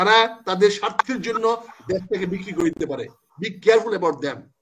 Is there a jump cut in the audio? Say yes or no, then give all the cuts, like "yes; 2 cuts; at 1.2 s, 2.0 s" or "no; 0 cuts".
no; 0 cuts